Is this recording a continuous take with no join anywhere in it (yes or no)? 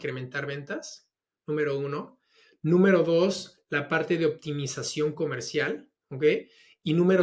yes